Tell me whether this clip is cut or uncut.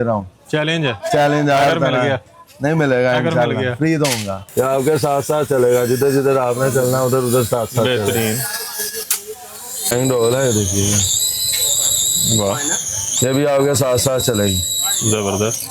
cut